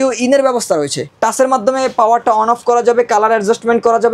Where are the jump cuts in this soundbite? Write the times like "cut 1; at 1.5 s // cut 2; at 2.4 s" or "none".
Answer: cut 1; at 1.0 s